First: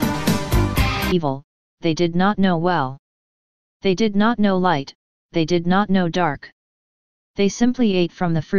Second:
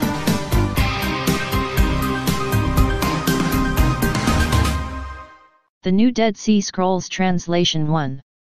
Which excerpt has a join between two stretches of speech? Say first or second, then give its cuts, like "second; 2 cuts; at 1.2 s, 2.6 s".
second; 1 cut; at 1.1 s